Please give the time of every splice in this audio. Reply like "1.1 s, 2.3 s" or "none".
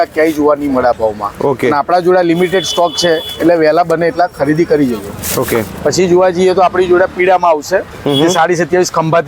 none